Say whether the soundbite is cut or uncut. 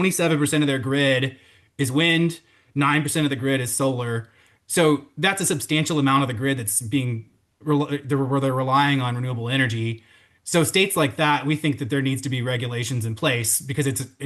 uncut